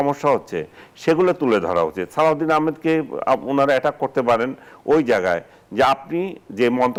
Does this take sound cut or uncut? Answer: uncut